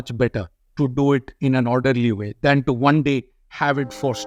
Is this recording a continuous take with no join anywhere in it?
yes; 0 cuts

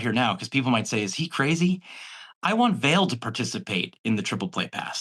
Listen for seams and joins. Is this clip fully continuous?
yes; 0 cuts

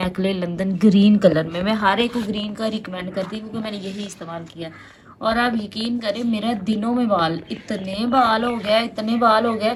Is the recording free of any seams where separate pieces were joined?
yes; 0 cuts

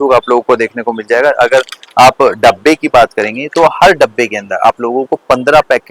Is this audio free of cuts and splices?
yes; 0 cuts

